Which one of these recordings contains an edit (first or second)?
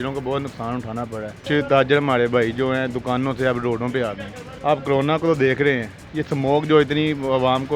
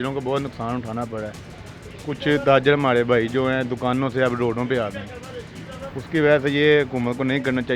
first